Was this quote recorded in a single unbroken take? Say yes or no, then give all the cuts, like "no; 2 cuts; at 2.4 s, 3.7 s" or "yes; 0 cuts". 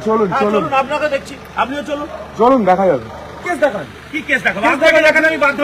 no; 1 cut; at 3.4 s